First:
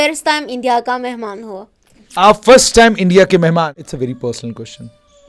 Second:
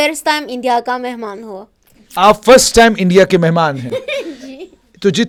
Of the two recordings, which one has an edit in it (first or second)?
first